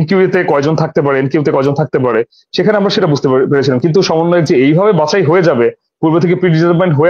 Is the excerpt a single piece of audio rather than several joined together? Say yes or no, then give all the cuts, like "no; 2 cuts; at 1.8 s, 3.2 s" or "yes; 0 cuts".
yes; 0 cuts